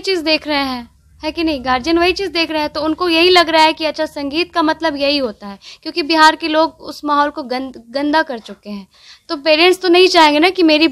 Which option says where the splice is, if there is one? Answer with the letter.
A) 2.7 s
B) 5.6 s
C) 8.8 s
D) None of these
D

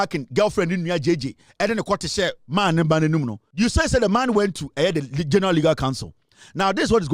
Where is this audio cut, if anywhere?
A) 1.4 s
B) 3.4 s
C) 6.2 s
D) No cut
B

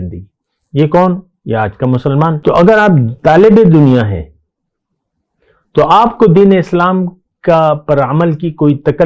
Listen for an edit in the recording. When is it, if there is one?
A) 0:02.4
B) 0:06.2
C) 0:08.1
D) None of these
A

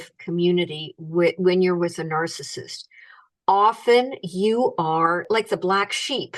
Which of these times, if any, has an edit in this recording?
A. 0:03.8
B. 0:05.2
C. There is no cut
B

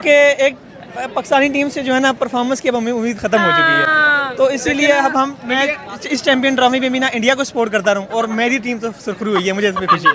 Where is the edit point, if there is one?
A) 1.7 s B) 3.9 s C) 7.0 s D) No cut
D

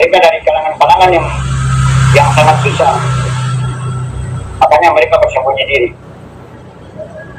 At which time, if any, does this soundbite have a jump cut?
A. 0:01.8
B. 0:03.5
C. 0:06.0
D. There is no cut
D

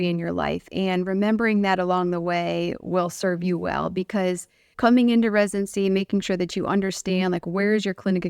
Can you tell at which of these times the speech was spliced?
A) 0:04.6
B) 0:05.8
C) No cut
A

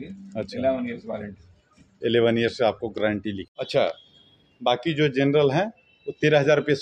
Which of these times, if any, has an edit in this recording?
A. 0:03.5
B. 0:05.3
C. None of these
A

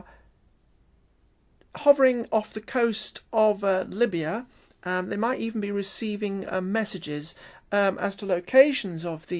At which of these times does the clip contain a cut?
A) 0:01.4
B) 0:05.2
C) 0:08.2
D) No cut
D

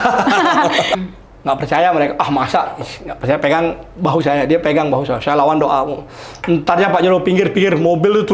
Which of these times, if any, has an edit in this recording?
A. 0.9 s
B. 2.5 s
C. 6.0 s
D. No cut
A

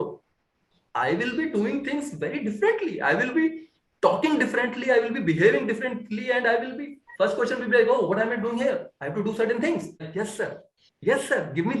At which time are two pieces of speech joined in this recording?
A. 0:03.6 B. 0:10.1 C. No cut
B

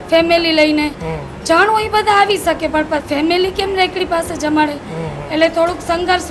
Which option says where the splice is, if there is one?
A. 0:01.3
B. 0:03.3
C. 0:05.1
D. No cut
D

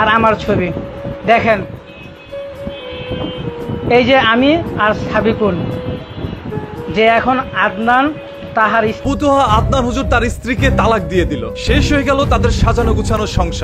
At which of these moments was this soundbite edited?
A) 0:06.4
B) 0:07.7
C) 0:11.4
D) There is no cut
D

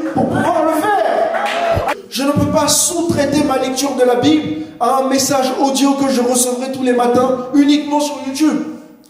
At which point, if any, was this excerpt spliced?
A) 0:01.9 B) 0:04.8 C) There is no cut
A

